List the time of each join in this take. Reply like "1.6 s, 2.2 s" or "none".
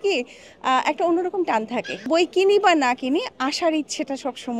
2.0 s